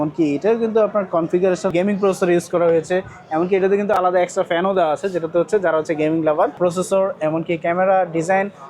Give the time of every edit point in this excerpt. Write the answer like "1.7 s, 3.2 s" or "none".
1.7 s, 6.6 s